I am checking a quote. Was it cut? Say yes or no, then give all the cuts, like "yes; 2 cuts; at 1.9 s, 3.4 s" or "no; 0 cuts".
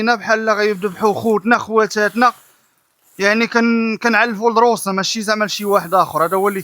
no; 0 cuts